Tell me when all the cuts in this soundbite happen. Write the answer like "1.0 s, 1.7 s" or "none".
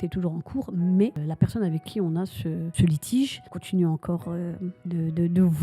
1.2 s, 2.7 s, 3.5 s, 4.7 s